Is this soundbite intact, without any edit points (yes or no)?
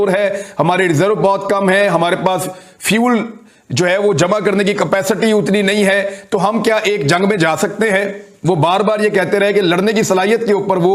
yes